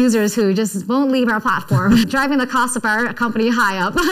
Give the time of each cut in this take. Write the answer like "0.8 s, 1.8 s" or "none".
2.0 s